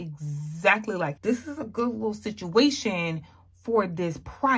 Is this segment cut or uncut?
cut